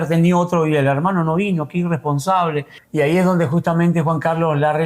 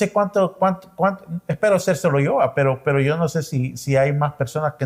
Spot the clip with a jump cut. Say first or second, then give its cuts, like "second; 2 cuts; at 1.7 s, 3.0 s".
first; 1 cut; at 2.8 s